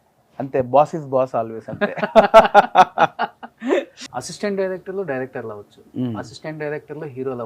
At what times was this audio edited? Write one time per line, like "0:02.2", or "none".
0:04.0

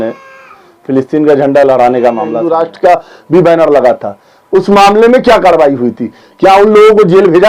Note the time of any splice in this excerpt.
0:02.4

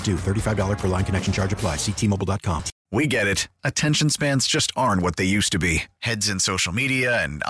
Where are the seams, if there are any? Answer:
0:02.7

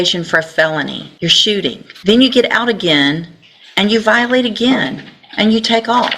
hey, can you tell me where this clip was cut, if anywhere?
0:01.1
0:01.9

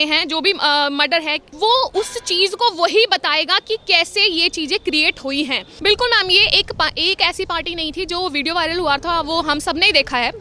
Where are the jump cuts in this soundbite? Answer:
0:01.4
0:05.7

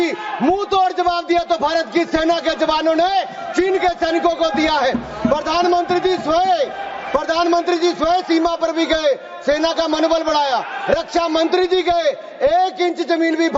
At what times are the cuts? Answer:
none

